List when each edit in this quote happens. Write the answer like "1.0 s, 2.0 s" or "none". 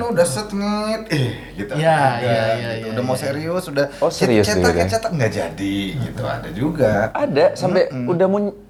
none

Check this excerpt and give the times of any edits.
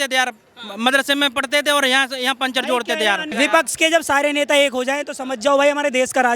3.3 s

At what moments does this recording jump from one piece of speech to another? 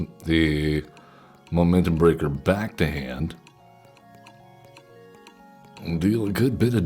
4.0 s

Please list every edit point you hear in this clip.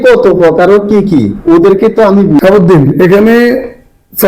2.4 s

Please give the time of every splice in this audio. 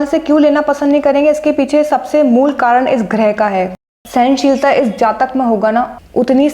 3.9 s

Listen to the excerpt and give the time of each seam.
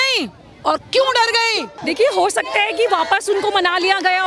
1.7 s

